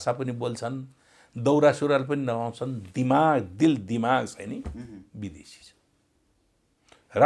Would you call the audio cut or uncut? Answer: uncut